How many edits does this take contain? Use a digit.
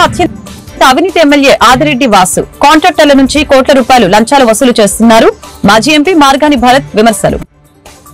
0